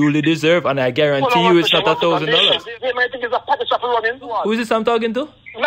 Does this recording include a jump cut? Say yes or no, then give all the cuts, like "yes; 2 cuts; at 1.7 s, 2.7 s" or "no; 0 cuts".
yes; 2 cuts; at 2.7 s, 4.3 s